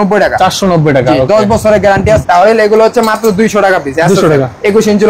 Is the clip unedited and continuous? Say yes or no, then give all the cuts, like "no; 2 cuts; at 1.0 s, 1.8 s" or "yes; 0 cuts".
no; 1 cut; at 2.2 s